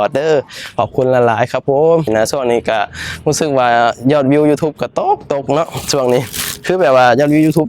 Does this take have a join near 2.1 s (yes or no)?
yes